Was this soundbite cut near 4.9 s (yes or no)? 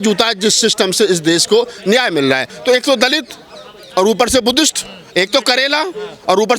no